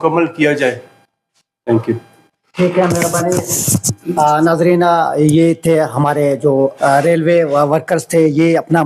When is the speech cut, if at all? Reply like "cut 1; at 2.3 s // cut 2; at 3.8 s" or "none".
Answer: none